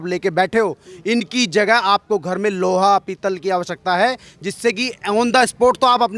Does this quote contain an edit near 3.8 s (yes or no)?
no